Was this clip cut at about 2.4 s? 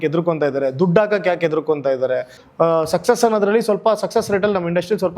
yes; 1 cut; at 2.4 s

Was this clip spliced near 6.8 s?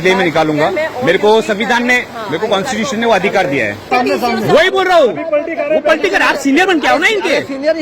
no; 1 cut; at 3.9 s

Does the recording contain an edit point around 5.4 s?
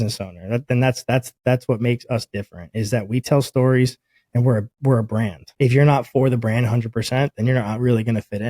yes; 1 cut; at 5.4 s

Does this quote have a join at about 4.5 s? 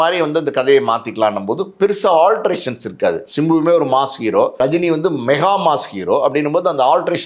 yes; 2 cuts; at 3.3 s, 4.5 s

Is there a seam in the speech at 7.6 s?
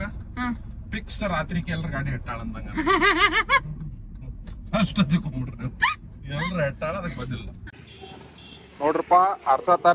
yes; 1 cut; at 7.6 s

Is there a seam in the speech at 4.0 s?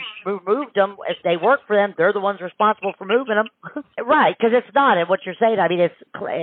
yes; 1 cut; at 4.0 s

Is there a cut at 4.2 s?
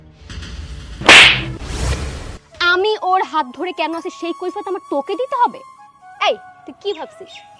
no; 0 cuts

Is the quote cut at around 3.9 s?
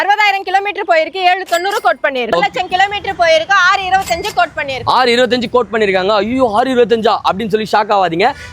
no; 1 cut; at 2.3 s

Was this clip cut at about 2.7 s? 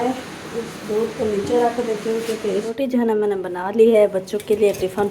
yes; 1 cut; at 2.7 s

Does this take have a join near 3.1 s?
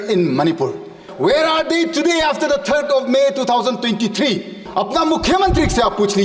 no; 2 cuts; at 1.1 s, 4.6 s

